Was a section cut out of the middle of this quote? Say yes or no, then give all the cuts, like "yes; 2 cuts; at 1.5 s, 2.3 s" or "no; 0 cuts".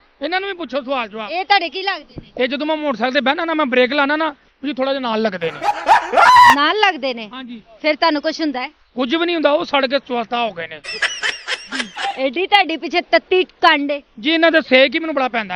no; 0 cuts